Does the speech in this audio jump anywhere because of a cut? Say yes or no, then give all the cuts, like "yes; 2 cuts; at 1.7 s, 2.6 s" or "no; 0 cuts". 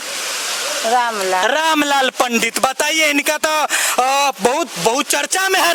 no; 0 cuts